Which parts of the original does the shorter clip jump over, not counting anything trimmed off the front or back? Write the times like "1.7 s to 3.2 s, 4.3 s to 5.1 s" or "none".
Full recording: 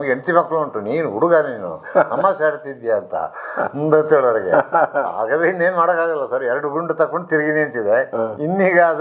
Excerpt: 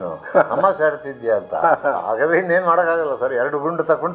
3.2 s to 4.7 s